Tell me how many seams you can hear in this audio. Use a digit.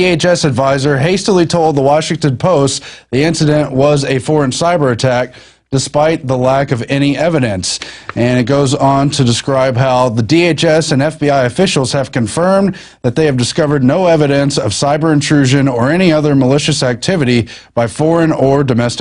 1